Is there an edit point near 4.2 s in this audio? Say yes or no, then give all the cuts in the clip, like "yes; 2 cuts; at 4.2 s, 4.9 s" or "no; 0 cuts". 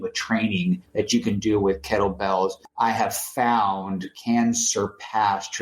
no; 2 cuts; at 0.9 s, 2.6 s